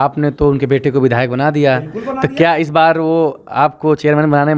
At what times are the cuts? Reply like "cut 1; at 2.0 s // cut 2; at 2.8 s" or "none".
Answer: none